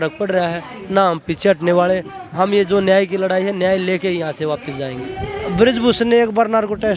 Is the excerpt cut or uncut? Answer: cut